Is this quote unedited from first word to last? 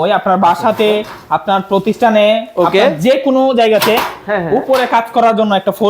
yes; 0 cuts

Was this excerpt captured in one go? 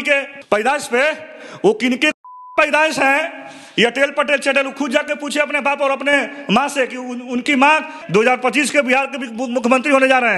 no; 1 cut; at 8.0 s

